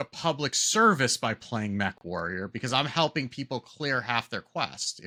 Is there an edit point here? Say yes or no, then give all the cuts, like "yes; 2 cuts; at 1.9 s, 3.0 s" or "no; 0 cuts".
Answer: no; 0 cuts